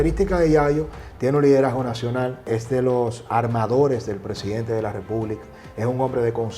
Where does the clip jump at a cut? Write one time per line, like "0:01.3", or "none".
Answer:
0:02.5